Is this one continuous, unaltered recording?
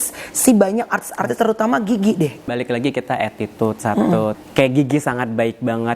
no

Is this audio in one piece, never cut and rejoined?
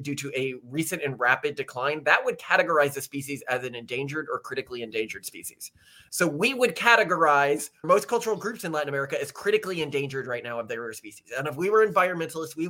no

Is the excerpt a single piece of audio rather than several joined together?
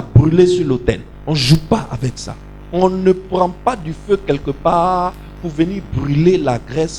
no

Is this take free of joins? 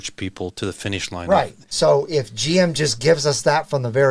no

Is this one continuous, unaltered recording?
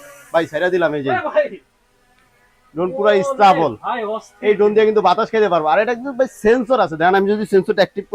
yes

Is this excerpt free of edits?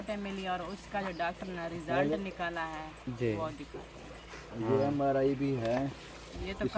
yes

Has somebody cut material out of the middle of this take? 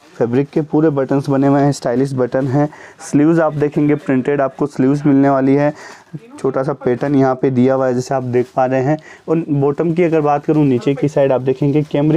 no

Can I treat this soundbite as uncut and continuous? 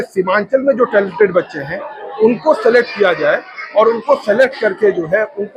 yes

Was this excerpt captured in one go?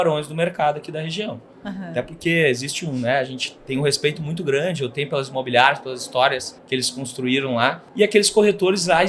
yes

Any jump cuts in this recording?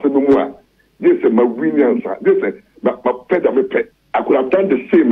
yes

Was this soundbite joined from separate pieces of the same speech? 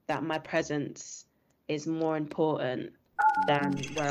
no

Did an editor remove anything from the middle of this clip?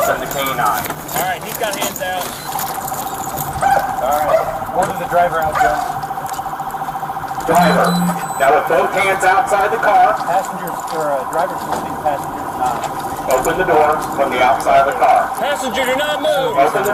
no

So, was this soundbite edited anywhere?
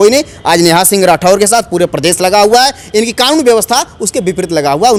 no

